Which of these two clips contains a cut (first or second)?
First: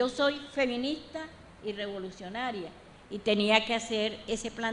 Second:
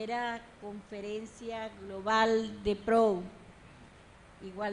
first